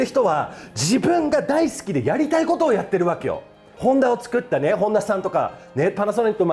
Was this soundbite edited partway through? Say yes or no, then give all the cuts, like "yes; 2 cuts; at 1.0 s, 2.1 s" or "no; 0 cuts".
yes; 1 cut; at 3.7 s